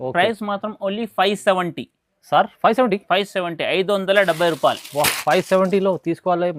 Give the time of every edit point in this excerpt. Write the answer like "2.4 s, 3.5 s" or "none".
none